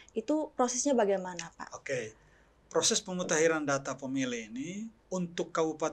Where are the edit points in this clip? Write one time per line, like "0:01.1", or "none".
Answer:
0:05.0